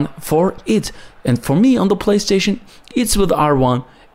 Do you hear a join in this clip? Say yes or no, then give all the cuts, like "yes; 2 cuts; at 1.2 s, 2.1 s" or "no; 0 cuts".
no; 0 cuts